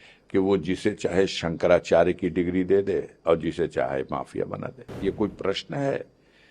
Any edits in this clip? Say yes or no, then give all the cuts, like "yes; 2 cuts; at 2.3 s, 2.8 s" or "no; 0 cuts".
yes; 1 cut; at 5.0 s